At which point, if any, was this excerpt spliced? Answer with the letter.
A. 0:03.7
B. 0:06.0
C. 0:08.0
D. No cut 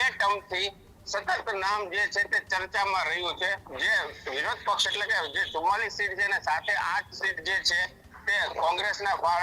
A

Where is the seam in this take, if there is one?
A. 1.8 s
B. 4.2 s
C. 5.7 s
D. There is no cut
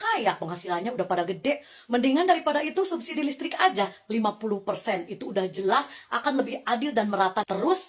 D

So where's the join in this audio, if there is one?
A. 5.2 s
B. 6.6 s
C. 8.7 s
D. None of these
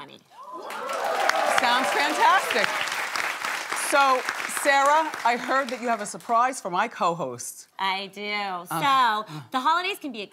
A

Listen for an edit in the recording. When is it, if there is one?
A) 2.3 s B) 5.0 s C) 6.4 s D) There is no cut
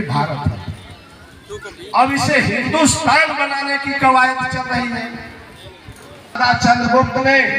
C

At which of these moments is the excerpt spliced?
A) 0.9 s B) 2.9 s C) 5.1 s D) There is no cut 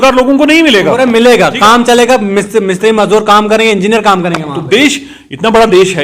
D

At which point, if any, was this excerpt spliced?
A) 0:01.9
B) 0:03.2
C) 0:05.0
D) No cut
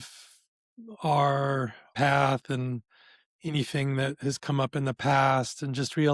A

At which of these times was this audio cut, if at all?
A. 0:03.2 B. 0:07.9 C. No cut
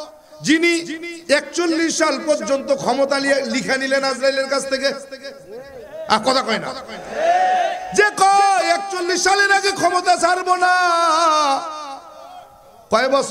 C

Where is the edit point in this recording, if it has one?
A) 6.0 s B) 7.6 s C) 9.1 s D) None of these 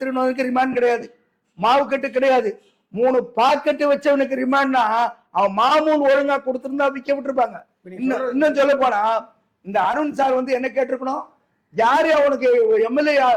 D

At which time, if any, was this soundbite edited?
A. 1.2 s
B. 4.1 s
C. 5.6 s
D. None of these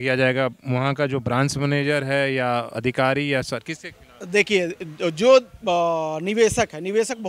D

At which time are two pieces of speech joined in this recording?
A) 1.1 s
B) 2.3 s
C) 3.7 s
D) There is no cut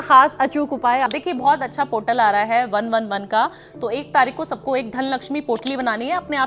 A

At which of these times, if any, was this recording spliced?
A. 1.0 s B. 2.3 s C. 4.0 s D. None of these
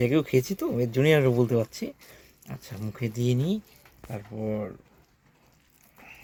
D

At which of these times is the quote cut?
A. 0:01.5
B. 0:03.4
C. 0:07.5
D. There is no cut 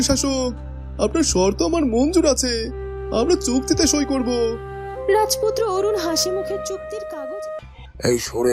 C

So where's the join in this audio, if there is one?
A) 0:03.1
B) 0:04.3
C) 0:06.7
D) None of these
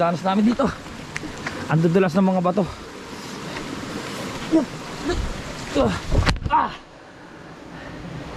D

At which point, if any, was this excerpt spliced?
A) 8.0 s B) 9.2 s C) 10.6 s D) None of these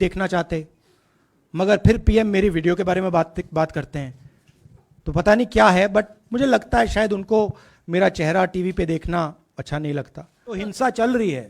C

